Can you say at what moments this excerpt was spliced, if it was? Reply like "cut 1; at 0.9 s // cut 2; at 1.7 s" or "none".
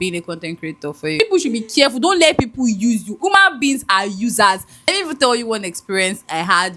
cut 1; at 1.1 s // cut 2; at 4.7 s